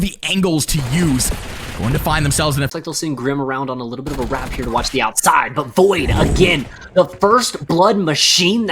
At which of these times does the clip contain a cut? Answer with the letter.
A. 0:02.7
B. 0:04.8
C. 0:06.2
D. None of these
A